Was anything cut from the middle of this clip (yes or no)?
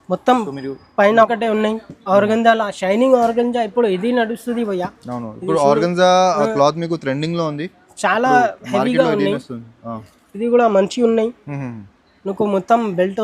yes